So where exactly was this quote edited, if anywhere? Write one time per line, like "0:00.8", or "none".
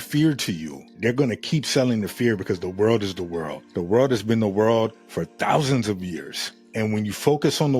0:01.0
0:06.6